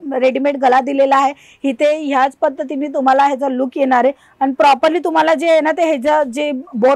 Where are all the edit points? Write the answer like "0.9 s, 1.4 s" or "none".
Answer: none